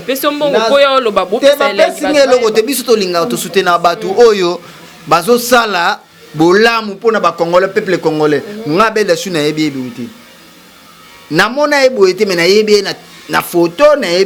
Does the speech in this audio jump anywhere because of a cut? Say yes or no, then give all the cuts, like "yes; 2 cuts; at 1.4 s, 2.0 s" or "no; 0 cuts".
no; 0 cuts